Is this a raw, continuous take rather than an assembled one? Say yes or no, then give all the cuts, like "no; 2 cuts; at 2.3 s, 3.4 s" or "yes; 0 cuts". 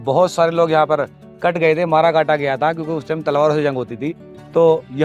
yes; 0 cuts